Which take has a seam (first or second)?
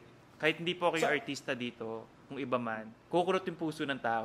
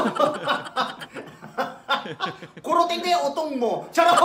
first